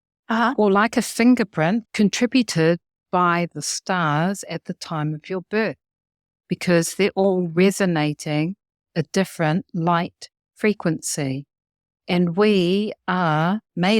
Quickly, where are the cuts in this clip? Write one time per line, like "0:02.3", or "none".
0:01.8
0:03.0